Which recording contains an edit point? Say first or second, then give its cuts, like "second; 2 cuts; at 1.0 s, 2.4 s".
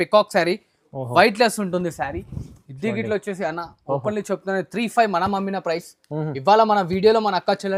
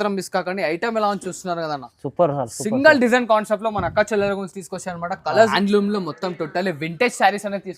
second; 1 cut; at 5.5 s